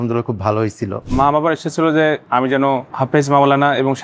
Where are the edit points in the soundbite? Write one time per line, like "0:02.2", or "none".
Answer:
0:01.0
0:02.8